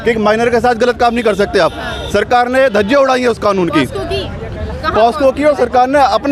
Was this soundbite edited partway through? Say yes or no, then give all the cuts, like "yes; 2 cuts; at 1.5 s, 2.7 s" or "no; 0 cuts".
no; 0 cuts